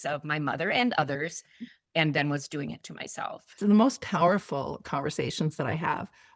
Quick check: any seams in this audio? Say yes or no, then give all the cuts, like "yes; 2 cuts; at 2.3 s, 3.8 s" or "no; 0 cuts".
yes; 1 cut; at 3.4 s